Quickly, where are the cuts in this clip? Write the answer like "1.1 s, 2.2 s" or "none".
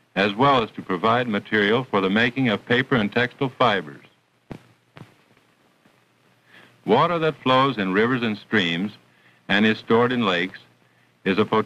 8.3 s